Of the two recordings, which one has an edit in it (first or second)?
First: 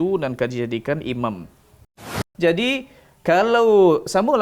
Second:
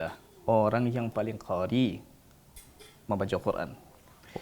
first